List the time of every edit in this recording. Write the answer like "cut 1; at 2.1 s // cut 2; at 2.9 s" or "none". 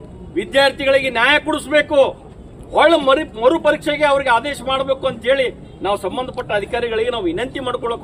none